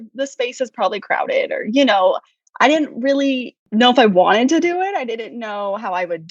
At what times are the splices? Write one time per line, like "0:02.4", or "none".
0:03.6